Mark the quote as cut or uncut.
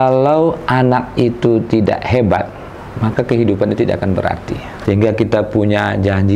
cut